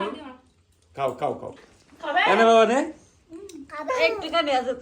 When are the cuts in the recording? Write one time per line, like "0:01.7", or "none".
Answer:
0:01.5
0:03.9